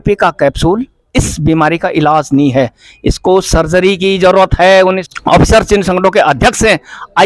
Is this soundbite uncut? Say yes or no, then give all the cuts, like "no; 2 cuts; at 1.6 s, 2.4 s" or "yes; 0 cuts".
no; 1 cut; at 5.1 s